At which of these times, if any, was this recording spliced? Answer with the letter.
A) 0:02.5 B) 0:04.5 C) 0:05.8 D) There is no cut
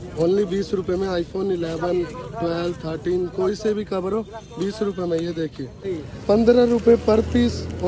C